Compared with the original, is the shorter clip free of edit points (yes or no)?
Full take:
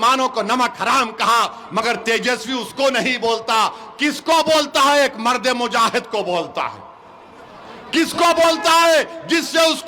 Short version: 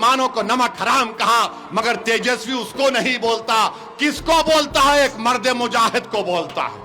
yes